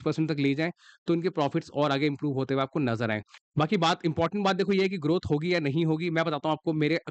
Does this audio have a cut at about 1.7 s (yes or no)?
no